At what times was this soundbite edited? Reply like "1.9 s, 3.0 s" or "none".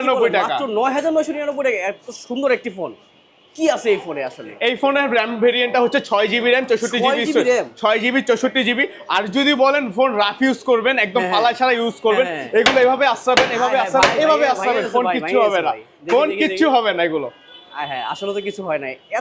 none

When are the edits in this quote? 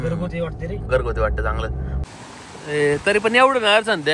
2.0 s

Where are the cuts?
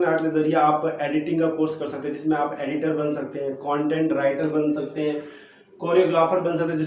none

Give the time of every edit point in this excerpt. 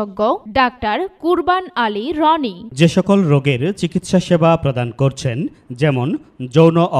2.6 s

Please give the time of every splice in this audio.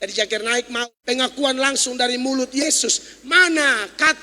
0.9 s

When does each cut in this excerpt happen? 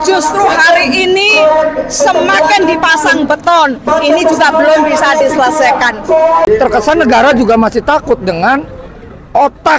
6.5 s

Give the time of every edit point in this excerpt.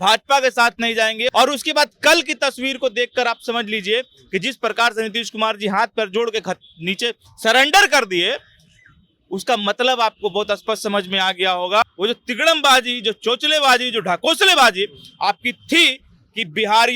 1.3 s, 11.8 s

